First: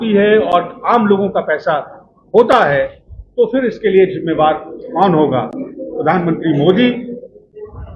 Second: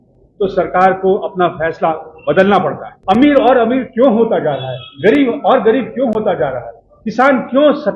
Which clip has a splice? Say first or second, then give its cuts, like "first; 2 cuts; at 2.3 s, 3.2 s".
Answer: second; 1 cut; at 2.9 s